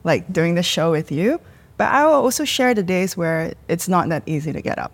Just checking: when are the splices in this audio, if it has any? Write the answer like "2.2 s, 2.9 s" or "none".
none